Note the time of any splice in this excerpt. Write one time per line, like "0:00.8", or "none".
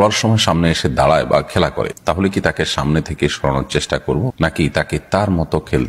none